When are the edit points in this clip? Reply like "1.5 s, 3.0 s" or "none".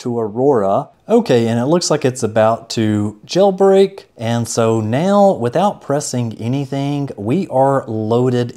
4.1 s

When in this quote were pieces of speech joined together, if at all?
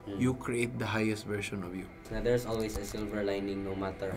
2.0 s

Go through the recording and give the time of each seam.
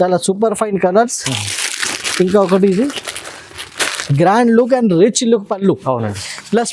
4.0 s

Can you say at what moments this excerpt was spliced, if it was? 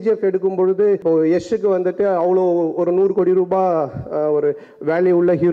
none

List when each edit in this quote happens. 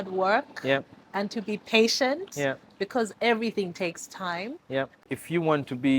4.9 s

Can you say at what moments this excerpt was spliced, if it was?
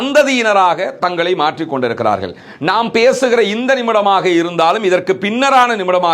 none

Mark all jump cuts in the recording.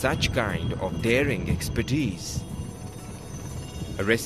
1.1 s

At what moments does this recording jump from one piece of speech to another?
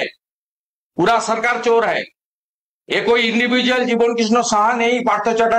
none

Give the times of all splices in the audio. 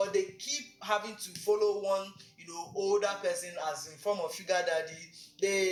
none

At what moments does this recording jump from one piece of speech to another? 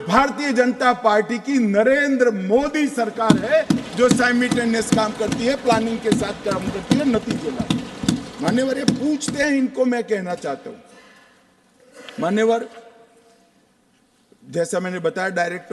none

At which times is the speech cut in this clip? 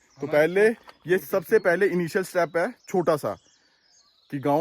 none

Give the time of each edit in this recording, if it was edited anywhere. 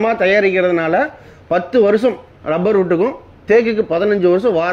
none

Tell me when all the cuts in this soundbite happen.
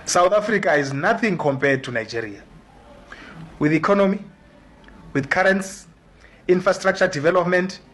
none

